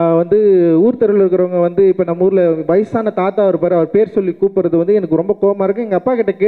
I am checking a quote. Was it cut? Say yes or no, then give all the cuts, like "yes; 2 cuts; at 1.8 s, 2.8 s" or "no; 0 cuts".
no; 0 cuts